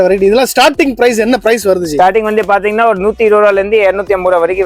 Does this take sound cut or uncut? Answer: uncut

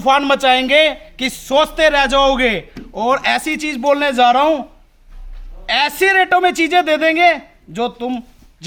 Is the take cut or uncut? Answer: uncut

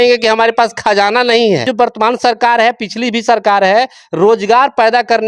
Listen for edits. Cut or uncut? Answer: cut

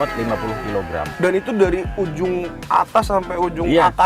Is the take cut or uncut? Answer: cut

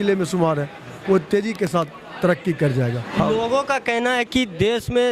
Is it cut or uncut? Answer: cut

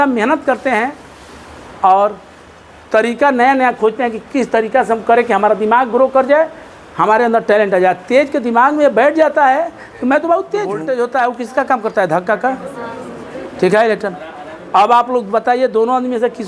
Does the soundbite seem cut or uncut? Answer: cut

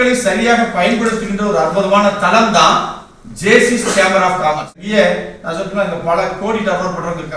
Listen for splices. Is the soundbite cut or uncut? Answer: cut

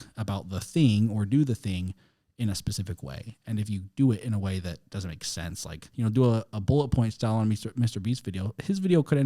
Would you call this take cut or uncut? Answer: cut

